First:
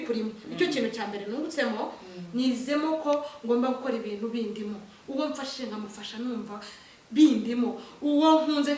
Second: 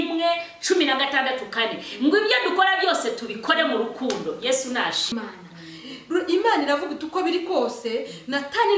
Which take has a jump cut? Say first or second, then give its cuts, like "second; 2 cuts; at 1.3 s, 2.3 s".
second; 1 cut; at 5.1 s